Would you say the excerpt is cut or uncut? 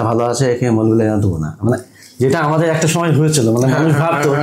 uncut